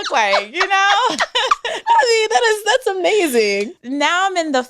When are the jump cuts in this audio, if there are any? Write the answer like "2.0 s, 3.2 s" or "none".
3.8 s